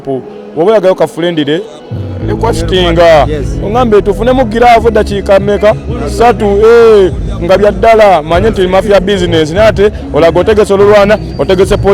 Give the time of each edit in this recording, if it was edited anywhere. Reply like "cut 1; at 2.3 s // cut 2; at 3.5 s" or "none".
none